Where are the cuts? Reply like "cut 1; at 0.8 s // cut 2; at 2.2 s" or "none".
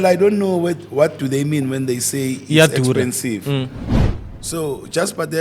cut 1; at 3.9 s